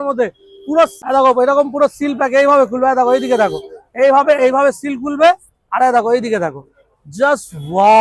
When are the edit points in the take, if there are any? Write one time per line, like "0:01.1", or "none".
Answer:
0:00.9